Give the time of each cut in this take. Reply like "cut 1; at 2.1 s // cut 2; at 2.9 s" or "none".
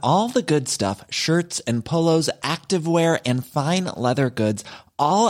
none